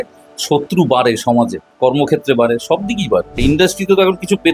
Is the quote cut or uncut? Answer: cut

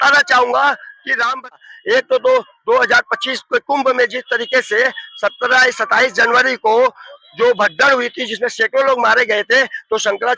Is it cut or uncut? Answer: cut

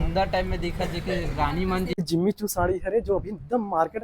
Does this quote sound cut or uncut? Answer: cut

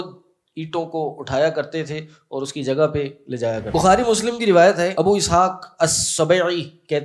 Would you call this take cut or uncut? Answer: cut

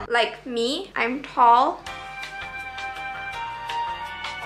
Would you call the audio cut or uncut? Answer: uncut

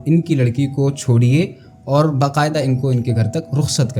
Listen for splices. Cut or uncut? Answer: uncut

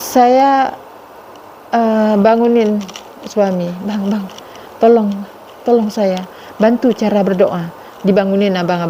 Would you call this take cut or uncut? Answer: uncut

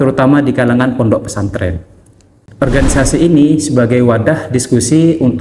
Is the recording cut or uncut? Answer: cut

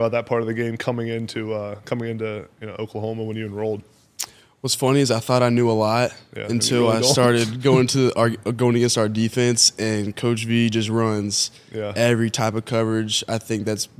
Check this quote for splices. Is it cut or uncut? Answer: uncut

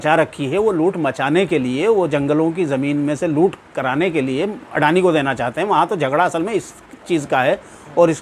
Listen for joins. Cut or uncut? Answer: uncut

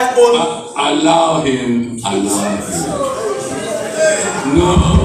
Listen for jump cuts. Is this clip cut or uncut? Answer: uncut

